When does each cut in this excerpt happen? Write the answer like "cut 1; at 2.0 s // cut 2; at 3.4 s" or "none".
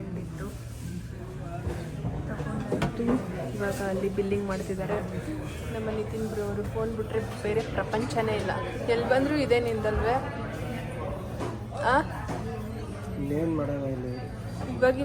none

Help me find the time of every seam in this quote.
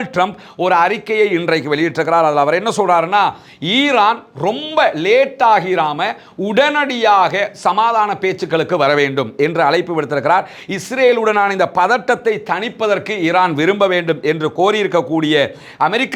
none

